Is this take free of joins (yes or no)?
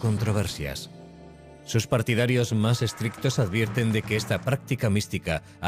yes